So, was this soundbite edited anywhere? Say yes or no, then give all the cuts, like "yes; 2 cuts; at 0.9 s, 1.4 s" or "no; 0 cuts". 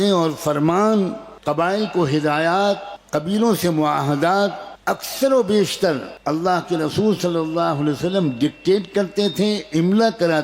yes; 4 cuts; at 1.3 s, 2.9 s, 4.7 s, 6.1 s